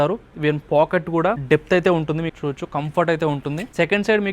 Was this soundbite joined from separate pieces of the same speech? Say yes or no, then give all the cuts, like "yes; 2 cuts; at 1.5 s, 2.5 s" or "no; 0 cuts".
yes; 2 cuts; at 1.4 s, 2.3 s